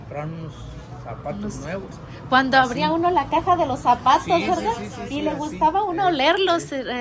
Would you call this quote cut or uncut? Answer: uncut